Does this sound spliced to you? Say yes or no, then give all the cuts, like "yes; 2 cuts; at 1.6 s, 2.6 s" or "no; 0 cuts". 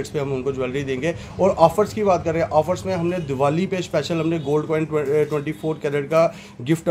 no; 0 cuts